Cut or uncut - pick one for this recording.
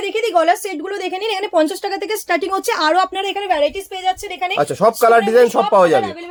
uncut